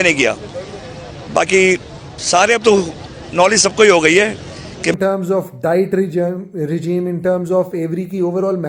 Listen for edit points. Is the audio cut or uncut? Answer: cut